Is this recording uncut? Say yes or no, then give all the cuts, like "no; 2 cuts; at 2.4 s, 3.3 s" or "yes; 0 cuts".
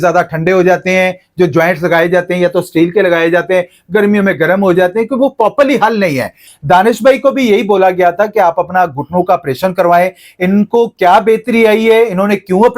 no; 1 cut; at 6.4 s